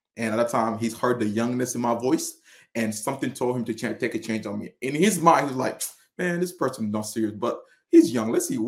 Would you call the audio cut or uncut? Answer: uncut